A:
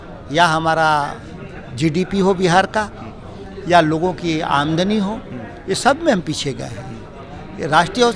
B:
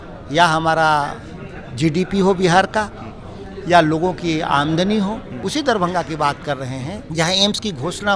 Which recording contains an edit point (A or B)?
B